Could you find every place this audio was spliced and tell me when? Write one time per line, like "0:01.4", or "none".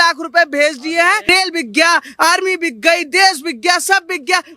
0:01.3